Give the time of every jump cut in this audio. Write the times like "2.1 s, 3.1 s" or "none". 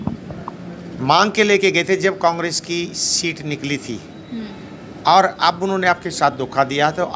none